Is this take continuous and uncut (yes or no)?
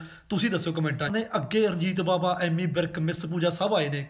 no